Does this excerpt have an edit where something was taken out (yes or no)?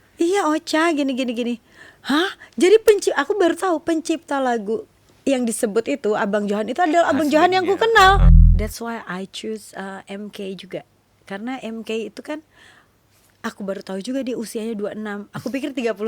yes